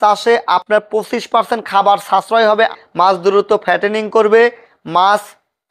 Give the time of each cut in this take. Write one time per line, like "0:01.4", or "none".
0:02.7